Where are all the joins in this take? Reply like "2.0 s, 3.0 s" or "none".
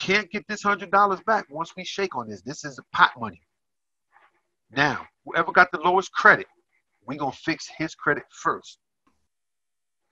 9.0 s

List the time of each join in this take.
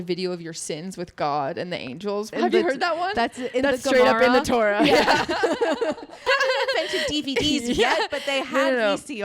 2.3 s, 6.2 s

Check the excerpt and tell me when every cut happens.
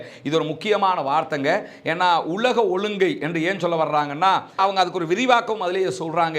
4.6 s

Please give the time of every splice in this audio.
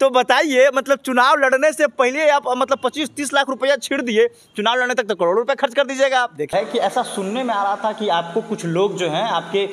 6.5 s

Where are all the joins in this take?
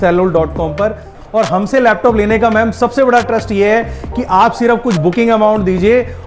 1.2 s

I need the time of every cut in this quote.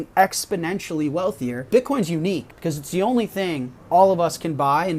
1.7 s, 2.5 s, 3.7 s

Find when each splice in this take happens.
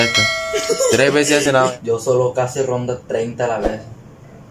1.4 s

